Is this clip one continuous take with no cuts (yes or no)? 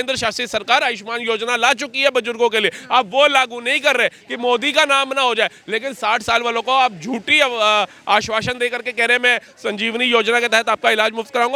yes